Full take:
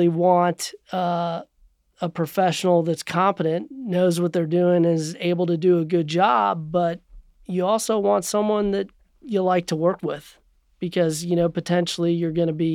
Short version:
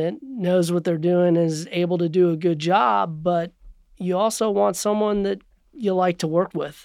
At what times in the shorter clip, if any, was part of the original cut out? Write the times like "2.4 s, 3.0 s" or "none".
none